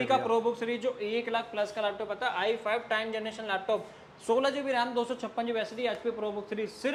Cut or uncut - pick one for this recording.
uncut